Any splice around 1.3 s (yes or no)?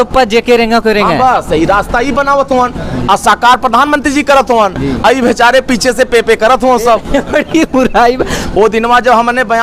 no